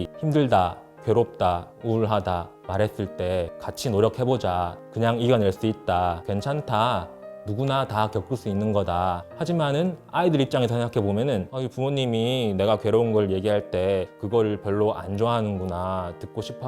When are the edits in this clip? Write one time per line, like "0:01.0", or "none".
0:03.6
0:09.3
0:11.5